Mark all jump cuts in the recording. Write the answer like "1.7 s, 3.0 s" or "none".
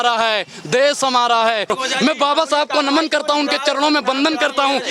1.7 s